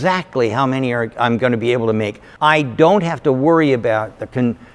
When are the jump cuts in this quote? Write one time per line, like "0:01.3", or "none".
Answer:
0:02.2

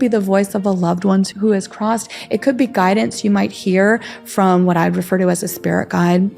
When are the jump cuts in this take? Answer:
0:01.3

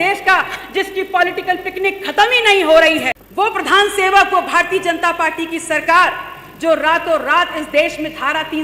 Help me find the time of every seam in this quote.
0:03.2

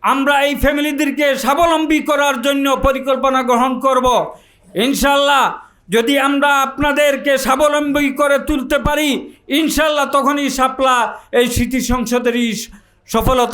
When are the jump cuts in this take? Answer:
none

